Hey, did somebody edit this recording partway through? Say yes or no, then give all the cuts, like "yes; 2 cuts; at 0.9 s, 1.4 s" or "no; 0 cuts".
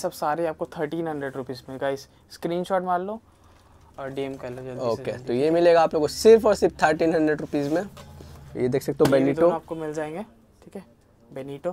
no; 0 cuts